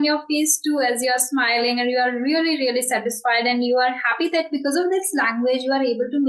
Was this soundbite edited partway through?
no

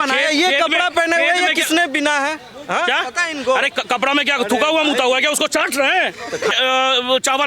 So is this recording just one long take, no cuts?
no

